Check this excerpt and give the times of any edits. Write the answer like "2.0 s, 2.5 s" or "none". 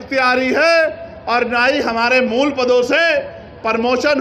none

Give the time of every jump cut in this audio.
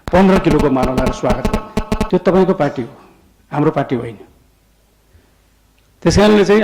2.0 s

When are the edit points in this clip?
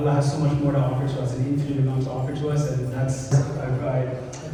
none

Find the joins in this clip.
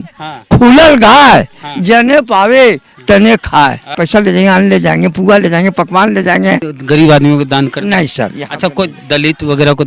4.0 s, 6.7 s

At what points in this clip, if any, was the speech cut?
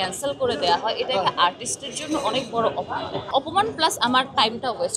3.3 s

